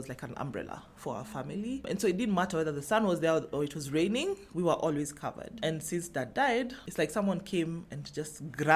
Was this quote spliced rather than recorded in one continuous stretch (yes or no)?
yes